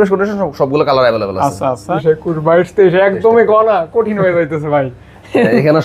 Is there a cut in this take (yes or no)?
yes